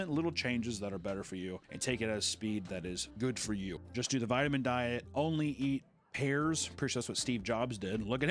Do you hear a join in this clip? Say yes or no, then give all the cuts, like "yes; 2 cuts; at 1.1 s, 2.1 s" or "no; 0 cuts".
yes; 1 cut; at 3.8 s